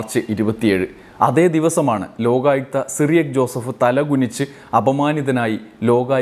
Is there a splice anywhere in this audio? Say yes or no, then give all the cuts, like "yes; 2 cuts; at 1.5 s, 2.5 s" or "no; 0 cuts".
no; 0 cuts